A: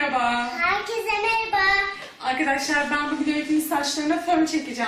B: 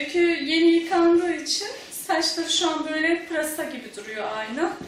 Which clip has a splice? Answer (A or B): B